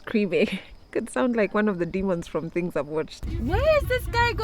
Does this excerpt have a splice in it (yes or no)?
yes